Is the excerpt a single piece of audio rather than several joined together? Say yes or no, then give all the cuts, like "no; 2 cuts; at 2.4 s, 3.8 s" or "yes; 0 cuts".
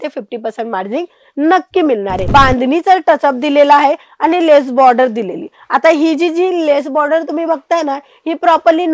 no; 1 cut; at 2.2 s